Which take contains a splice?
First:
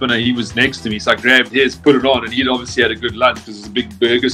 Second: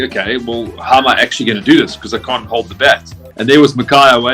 second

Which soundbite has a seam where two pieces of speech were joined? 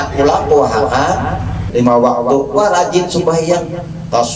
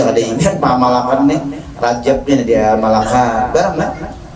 first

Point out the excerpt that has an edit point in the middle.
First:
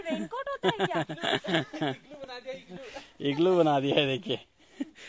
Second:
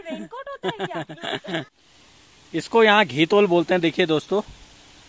second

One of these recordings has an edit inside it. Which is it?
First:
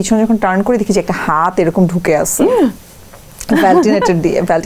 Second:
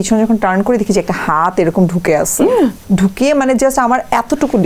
second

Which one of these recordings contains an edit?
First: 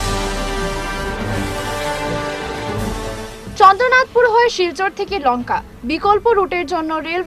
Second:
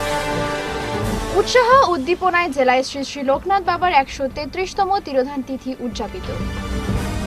first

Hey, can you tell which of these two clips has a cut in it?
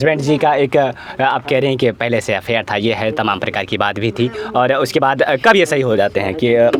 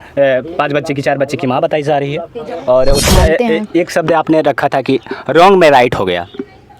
second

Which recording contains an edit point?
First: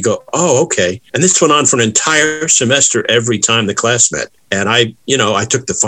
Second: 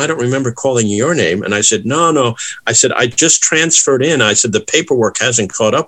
first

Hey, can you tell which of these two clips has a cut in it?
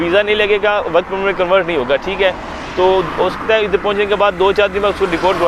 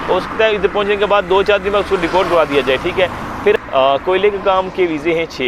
second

